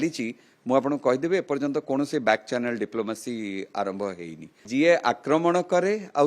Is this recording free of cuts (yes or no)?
no